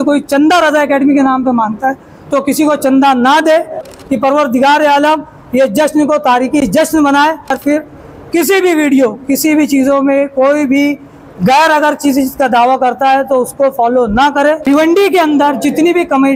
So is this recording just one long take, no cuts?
no; 3 cuts; at 3.9 s, 7.6 s, 14.6 s

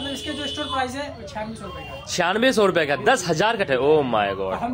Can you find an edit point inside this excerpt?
yes; 1 cut; at 3.7 s

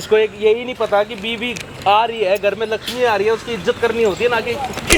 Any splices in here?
no; 0 cuts

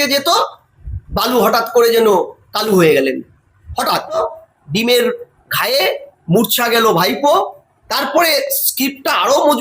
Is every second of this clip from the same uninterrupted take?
no; 1 cut; at 4.2 s

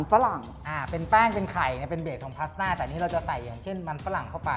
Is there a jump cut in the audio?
no; 0 cuts

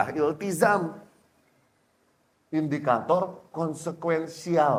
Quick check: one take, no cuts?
yes; 0 cuts

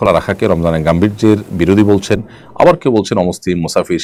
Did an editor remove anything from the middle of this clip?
no; 0 cuts

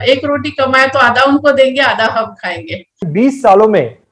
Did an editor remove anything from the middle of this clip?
yes; 1 cut; at 3.0 s

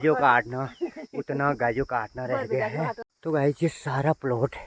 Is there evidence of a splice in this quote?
yes; 1 cut; at 3.0 s

